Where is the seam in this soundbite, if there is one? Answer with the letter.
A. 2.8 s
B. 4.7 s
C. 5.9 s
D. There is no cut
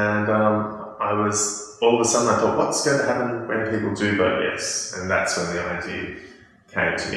D